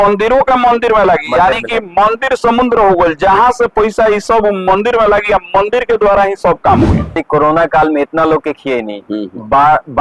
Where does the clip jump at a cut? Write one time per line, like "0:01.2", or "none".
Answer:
0:07.2

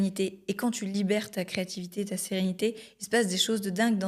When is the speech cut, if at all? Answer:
none

